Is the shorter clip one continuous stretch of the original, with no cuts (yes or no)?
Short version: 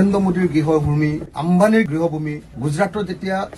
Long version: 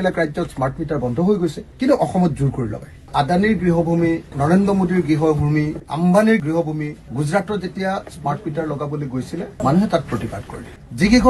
yes